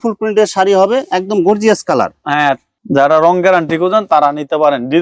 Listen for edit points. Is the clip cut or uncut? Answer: cut